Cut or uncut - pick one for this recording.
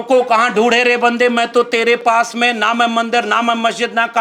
uncut